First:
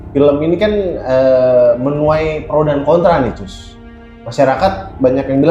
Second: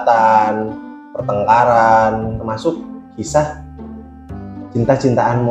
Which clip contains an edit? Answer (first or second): second